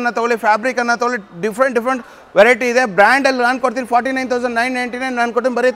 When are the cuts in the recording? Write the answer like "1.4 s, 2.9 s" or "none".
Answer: none